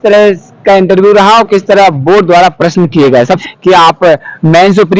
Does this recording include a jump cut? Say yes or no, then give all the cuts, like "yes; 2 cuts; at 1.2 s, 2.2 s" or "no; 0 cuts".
yes; 1 cut; at 3.4 s